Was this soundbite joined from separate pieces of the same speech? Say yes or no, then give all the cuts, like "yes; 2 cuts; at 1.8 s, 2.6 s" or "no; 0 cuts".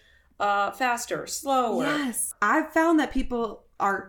yes; 1 cut; at 2.3 s